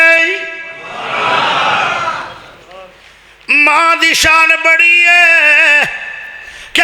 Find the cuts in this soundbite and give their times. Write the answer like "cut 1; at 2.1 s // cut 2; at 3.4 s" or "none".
none

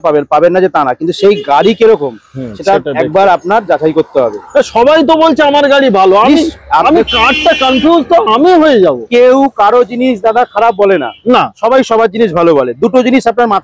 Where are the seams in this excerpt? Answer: none

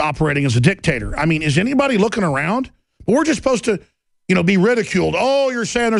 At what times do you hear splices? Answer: none

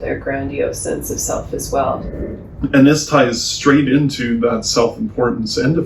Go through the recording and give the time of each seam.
cut 1; at 2.0 s

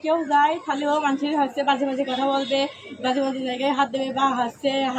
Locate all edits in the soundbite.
none

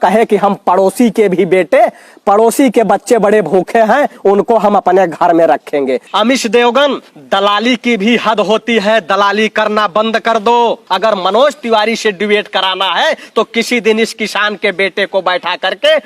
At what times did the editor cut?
cut 1; at 6.0 s // cut 2; at 10.8 s

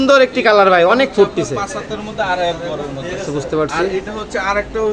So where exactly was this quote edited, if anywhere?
none

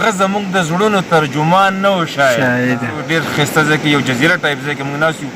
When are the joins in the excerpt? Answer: cut 1; at 2.9 s

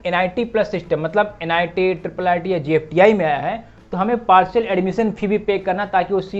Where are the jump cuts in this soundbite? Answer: none

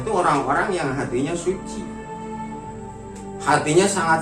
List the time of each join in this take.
cut 1; at 1.6 s // cut 2; at 3.5 s

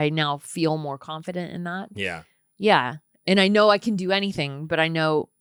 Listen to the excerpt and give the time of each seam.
none

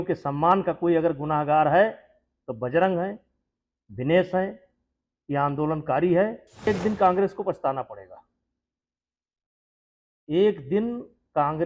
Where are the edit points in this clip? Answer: cut 1; at 6.7 s

